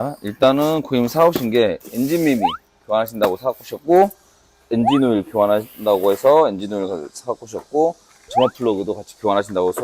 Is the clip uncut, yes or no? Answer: yes